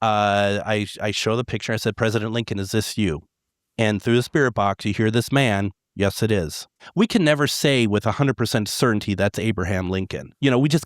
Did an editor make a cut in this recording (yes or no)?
yes